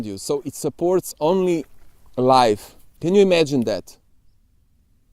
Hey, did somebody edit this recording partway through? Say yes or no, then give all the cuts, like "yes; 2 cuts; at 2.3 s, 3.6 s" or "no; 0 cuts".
no; 0 cuts